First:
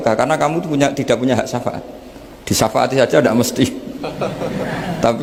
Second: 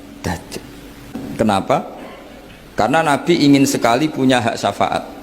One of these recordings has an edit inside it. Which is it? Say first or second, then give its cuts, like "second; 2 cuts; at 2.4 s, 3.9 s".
second; 1 cut; at 1.2 s